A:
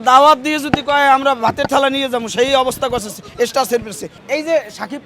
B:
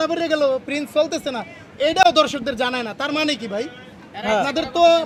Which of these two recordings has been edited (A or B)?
A